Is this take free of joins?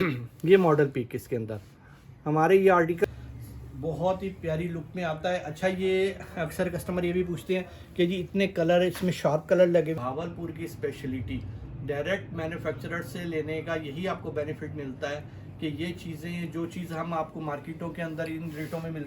no; 2 cuts; at 3.0 s, 10.0 s

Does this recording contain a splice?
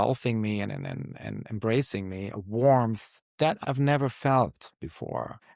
no; 0 cuts

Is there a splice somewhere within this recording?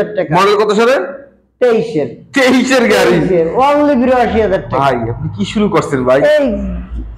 no; 0 cuts

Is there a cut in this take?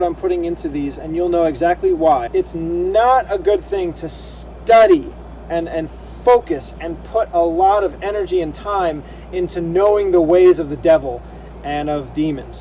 yes; 2 cuts; at 1.0 s, 2.2 s

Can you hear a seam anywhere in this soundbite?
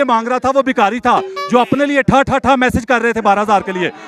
no; 0 cuts

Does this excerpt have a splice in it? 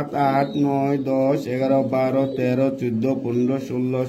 no; 0 cuts

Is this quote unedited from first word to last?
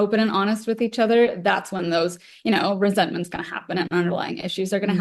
yes; 0 cuts

